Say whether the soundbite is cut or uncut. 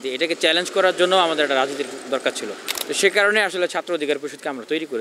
uncut